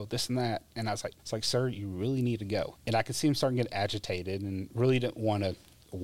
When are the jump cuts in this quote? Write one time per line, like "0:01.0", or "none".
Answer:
0:01.2
0:02.8